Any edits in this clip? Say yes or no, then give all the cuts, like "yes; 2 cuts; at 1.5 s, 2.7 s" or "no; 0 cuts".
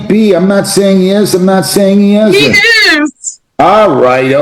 no; 0 cuts